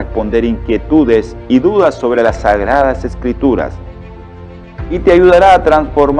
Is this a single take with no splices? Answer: yes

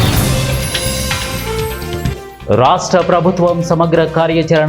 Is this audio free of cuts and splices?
no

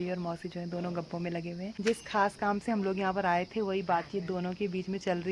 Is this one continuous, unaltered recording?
no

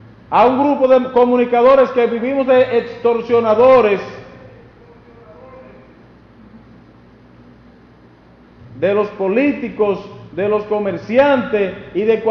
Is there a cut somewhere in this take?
no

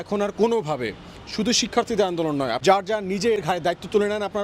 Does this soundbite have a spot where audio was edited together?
yes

